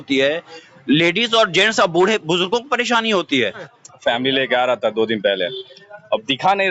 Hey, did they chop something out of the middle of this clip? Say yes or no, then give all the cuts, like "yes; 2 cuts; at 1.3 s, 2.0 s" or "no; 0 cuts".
yes; 1 cut; at 3.7 s